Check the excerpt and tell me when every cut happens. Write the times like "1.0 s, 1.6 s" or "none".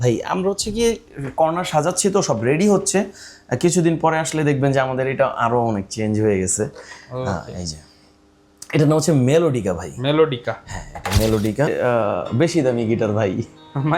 11.7 s